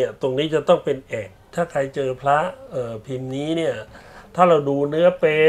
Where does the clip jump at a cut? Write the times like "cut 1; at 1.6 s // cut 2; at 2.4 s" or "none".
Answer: cut 1; at 1.5 s